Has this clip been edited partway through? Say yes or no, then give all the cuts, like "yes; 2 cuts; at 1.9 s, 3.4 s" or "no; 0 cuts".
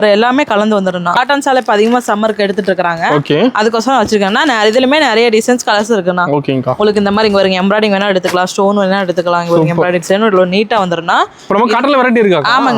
yes; 2 cuts; at 1.2 s, 11.4 s